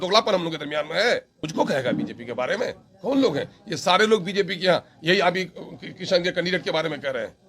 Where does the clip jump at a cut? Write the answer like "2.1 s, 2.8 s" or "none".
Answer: 1.4 s